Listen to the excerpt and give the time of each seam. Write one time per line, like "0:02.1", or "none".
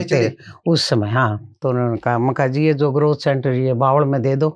0:01.5